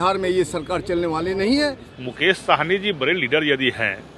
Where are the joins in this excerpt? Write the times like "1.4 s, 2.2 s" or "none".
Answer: 1.9 s